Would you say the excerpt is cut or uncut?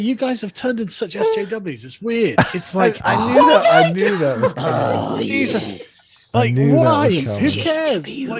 uncut